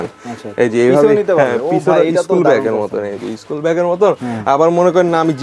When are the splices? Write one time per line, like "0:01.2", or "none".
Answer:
none